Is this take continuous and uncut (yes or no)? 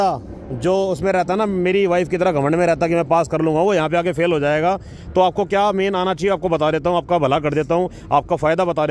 yes